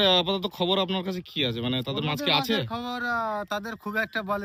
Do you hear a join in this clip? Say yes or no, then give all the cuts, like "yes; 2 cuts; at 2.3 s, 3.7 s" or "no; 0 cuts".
no; 0 cuts